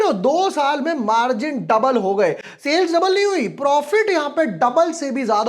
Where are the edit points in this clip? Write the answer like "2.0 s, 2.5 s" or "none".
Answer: none